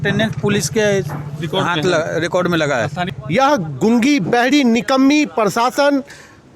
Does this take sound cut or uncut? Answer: cut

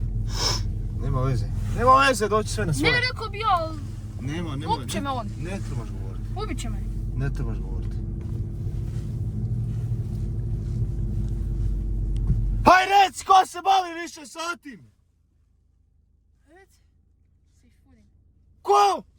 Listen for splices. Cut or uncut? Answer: uncut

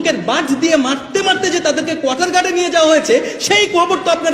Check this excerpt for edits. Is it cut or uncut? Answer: uncut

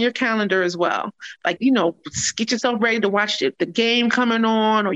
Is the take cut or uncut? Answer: uncut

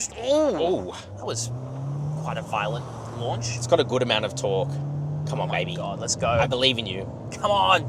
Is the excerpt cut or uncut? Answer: uncut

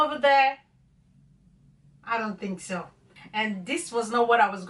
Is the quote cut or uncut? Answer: cut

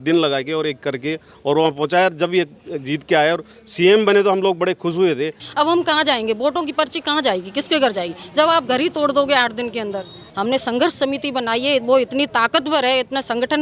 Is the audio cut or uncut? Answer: cut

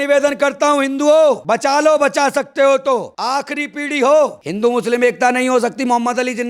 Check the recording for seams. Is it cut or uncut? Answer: cut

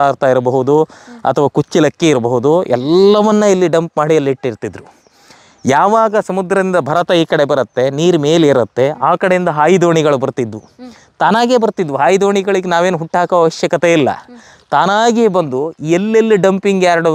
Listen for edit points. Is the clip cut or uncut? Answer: uncut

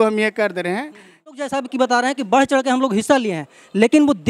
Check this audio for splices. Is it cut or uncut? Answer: cut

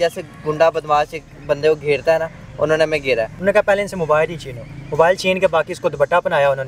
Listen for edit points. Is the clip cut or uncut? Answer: cut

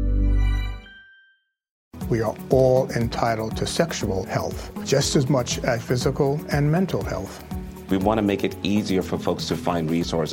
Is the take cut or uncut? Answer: cut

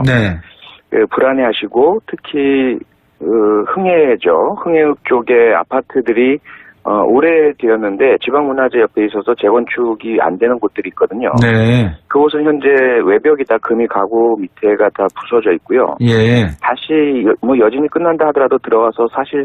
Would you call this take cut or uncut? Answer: cut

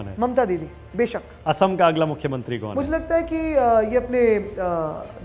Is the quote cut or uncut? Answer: uncut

